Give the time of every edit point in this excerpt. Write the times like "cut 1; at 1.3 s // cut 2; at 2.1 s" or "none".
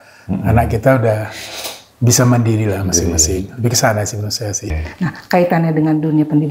cut 1; at 4.6 s